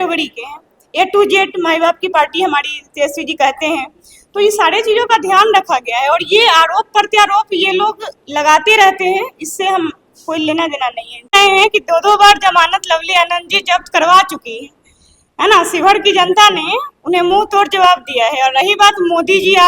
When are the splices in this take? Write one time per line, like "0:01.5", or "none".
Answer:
0:11.3